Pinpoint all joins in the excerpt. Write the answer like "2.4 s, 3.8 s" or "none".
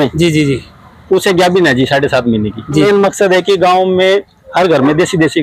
2.8 s